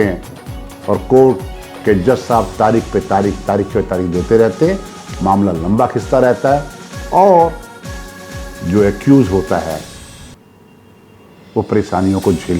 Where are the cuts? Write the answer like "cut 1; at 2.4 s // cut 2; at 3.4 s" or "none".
none